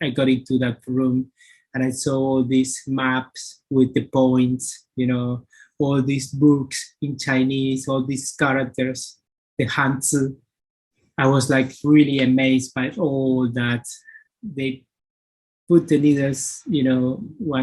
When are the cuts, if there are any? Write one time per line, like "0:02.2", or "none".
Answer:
0:14.3